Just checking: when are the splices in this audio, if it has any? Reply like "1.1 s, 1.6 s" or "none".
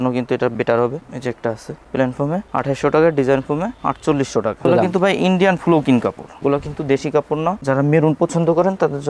1.0 s, 4.7 s, 7.6 s